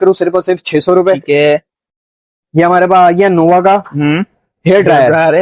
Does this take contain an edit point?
no; 0 cuts

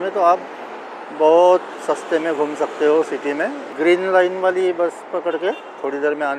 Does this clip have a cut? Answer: yes; 1 cut; at 3.7 s

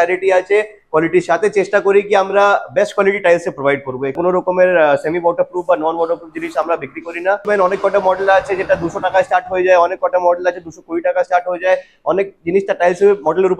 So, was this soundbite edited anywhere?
yes; 2 cuts; at 4.2 s, 7.5 s

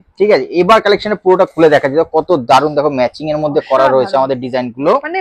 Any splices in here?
no; 0 cuts

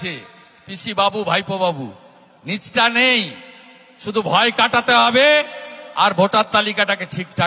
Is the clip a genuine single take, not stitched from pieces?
yes; 0 cuts

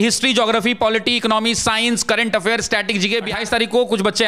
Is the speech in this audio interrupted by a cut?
yes; 1 cut; at 3.3 s

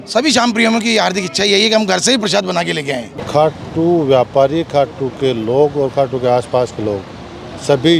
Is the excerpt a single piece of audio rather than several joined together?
no; 1 cut; at 3.2 s

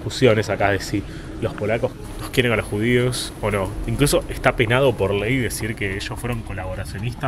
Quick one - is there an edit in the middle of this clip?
no; 0 cuts

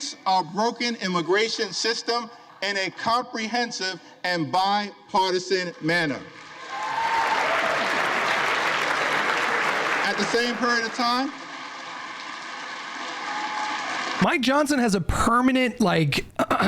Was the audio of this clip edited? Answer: no; 0 cuts

